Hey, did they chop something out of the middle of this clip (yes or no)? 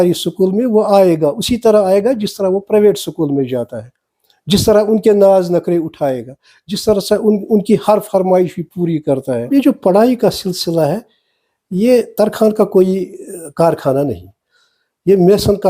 yes